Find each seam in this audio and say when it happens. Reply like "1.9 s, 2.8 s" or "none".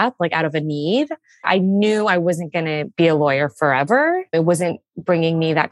1.4 s, 2.8 s, 4.2 s